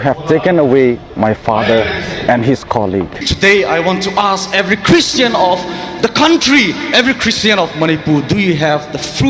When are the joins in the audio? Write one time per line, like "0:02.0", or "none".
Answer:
0:03.2